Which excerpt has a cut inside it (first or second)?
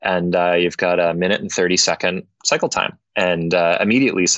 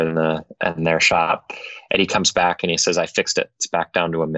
first